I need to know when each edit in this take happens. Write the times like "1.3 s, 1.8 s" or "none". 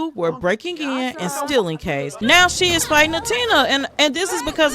2.1 s